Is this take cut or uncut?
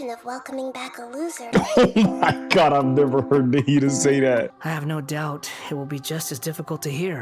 cut